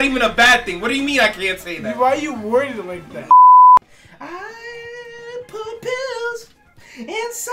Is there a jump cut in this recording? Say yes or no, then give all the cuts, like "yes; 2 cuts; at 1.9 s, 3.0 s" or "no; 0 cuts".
yes; 2 cuts; at 3.2 s, 3.9 s